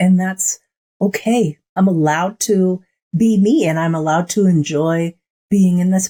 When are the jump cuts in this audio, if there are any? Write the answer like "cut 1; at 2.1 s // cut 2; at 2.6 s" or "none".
none